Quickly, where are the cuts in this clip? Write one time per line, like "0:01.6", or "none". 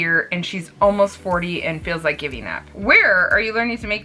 0:02.7